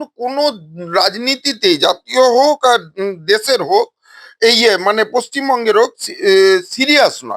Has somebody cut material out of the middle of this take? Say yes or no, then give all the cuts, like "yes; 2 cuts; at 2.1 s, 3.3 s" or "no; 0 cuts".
no; 0 cuts